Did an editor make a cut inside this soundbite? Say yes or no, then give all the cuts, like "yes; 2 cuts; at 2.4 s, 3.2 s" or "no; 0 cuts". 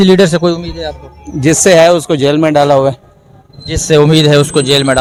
no; 0 cuts